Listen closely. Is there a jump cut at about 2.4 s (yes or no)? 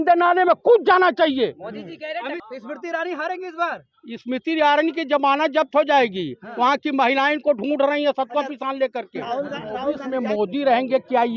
yes